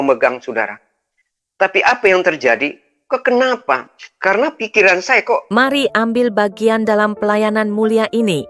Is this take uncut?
no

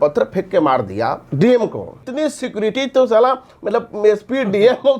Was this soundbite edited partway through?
yes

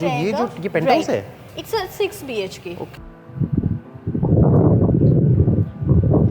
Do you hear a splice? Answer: yes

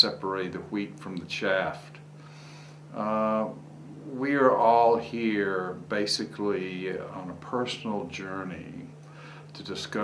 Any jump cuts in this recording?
no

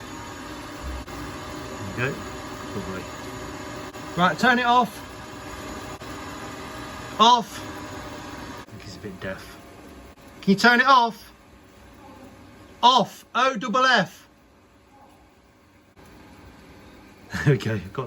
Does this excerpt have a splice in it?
yes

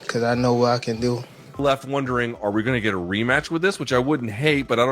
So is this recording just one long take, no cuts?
no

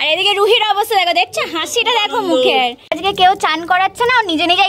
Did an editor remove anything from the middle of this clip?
yes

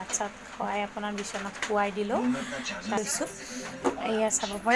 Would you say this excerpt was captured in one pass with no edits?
no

